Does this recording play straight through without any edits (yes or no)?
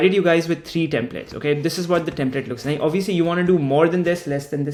yes